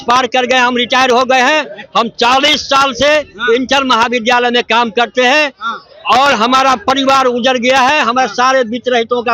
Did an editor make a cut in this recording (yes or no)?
no